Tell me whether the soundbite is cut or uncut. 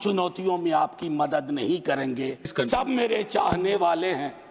cut